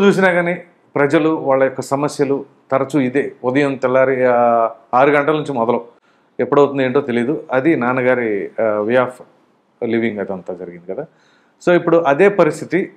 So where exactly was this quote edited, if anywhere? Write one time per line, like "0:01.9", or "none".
none